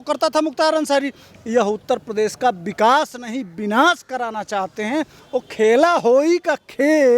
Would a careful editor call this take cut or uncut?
cut